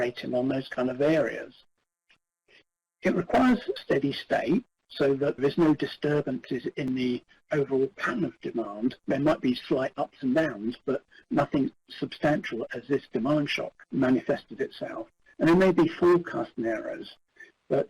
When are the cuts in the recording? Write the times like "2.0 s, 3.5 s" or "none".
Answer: 3.8 s, 5.4 s